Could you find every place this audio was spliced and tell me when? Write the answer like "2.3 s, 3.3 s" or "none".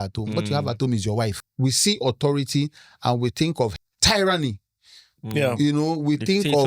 1.4 s, 3.7 s